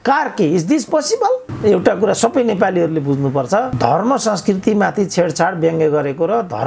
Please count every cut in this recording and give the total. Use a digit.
1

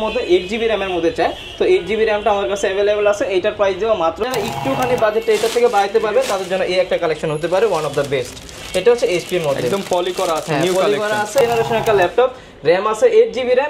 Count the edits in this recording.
2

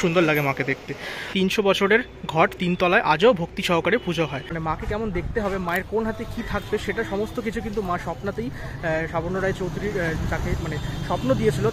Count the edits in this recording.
2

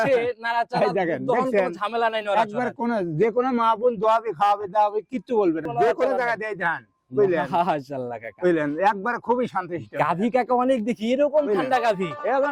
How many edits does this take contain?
1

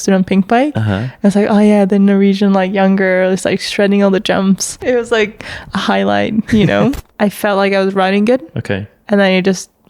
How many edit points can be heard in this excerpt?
2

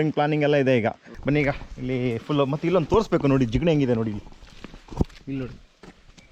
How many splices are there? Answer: 1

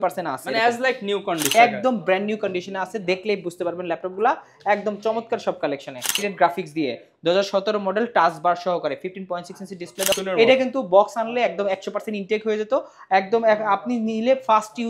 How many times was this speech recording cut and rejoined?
3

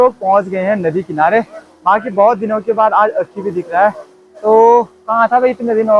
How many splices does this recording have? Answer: 0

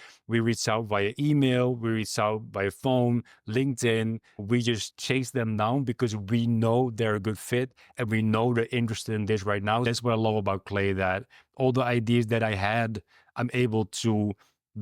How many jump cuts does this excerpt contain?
2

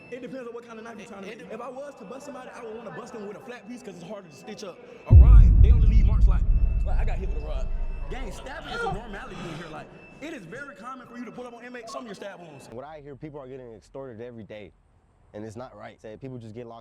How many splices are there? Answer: 1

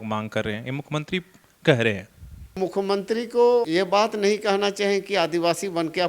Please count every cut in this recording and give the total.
2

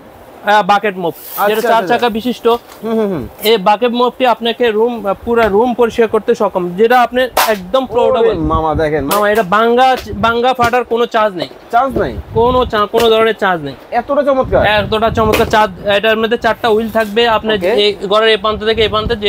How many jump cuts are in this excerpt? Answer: 0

